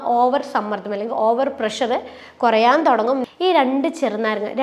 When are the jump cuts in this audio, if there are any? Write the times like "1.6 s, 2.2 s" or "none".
3.2 s